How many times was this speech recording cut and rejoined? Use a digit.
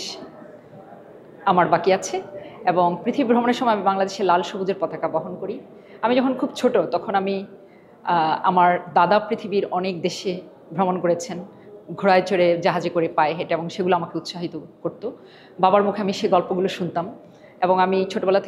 0